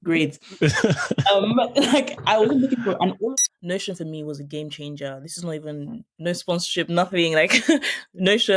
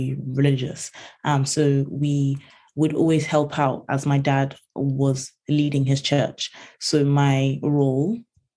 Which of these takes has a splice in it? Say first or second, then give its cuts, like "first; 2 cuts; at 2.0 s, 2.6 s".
first; 1 cut; at 3.2 s